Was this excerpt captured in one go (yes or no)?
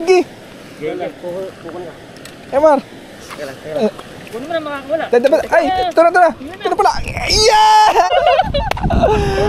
no